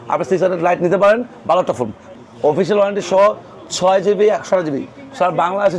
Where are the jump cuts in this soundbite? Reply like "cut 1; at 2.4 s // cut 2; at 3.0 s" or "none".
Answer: cut 1; at 2.1 s